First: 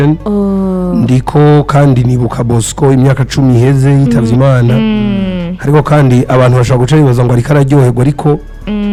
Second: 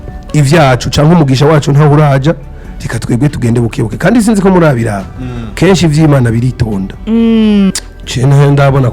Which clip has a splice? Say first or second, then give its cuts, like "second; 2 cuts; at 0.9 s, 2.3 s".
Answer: second; 1 cut; at 7.7 s